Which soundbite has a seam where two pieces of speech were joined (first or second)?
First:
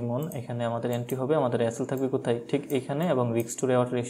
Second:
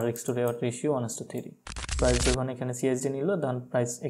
second